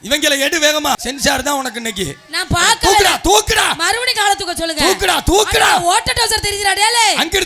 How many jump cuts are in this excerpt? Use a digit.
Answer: 1